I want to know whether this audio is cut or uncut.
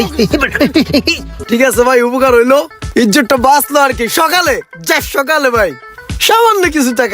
cut